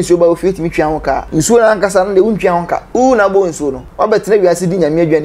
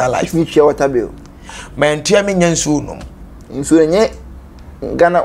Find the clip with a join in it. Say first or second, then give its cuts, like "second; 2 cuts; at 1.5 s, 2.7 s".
first; 3 cuts; at 1.2 s, 2.8 s, 3.8 s